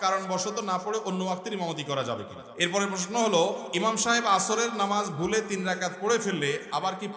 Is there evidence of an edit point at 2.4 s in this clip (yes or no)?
yes